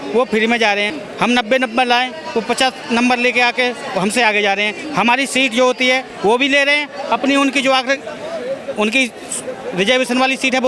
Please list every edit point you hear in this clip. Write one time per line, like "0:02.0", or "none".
none